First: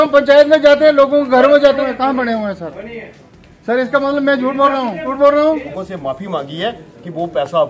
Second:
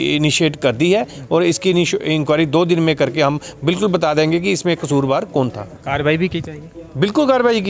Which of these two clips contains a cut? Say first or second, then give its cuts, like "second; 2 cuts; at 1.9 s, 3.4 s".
first; 3 cuts; at 1.8 s, 5.1 s, 5.7 s